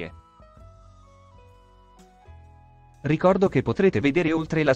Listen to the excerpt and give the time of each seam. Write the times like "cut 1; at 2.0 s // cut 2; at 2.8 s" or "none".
none